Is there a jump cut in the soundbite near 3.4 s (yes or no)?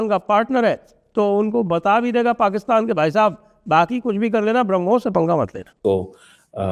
no